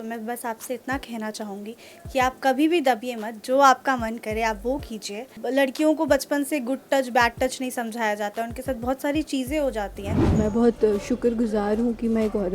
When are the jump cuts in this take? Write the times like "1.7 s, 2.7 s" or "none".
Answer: 5.3 s, 10.3 s

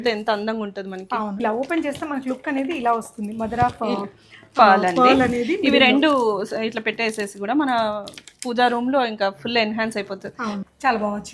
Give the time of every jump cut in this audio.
1.4 s, 10.6 s

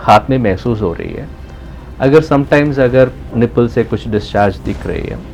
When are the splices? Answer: none

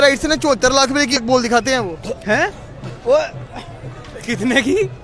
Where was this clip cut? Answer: 1.2 s

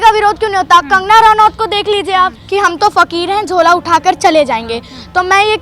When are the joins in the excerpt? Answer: 2.4 s

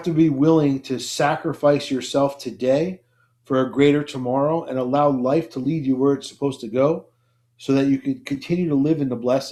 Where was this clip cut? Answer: none

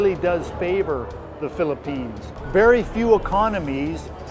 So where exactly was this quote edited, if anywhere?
2.4 s

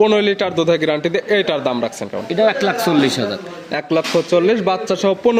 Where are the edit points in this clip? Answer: none

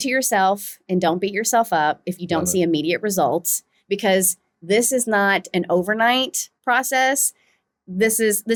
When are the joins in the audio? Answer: none

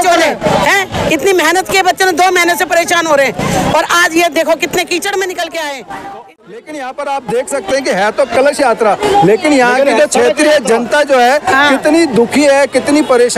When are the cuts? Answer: 6.3 s

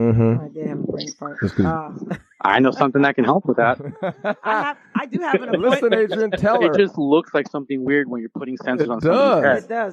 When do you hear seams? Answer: 6.7 s

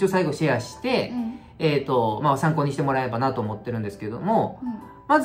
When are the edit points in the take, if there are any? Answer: none

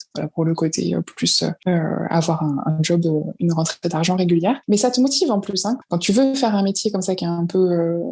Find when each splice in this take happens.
1.6 s, 4.6 s, 5.8 s

